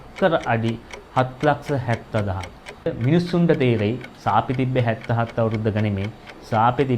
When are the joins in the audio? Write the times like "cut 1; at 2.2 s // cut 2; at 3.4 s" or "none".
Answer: cut 1; at 2.9 s